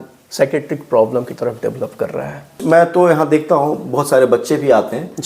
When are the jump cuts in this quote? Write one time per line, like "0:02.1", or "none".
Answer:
0:02.6